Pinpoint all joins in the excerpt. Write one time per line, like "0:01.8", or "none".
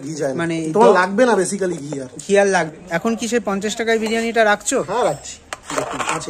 0:02.7